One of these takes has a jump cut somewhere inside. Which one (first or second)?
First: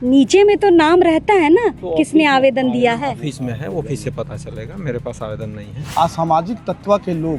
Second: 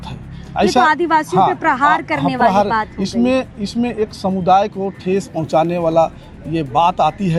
first